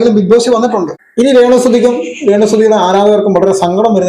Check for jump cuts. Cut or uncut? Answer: cut